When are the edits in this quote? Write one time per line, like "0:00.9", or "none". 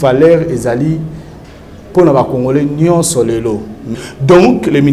0:04.0